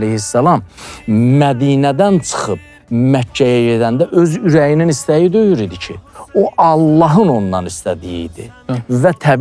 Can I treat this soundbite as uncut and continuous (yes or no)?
yes